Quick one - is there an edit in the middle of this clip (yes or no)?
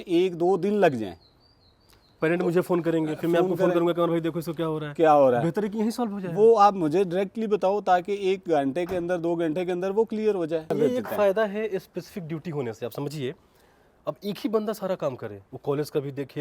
yes